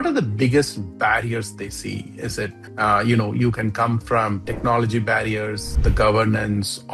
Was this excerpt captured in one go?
yes; 0 cuts

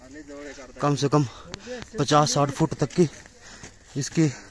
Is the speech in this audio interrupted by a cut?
no; 0 cuts

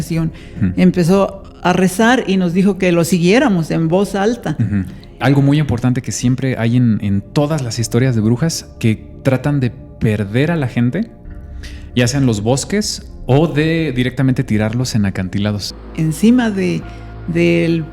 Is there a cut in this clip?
yes; 2 cuts; at 5.2 s, 15.7 s

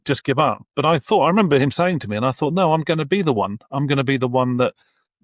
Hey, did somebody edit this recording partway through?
no; 0 cuts

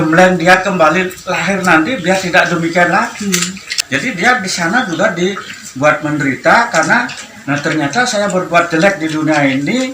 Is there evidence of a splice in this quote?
yes; 1 cut; at 3.8 s

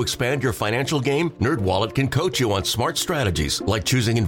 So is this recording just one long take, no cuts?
yes; 0 cuts

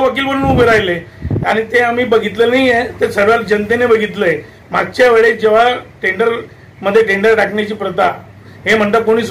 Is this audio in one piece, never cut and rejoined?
yes; 0 cuts

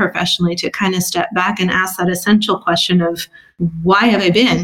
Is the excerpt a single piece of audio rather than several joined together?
yes; 0 cuts

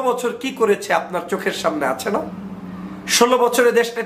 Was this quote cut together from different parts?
no; 0 cuts

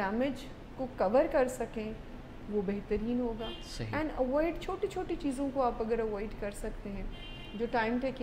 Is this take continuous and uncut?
yes; 0 cuts

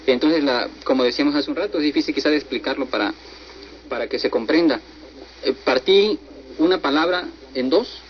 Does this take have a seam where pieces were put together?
no; 0 cuts

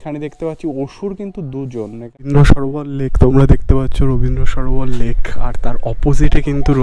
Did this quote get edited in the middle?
yes; 1 cut; at 2.3 s

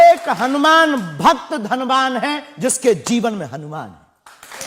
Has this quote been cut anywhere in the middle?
no; 0 cuts

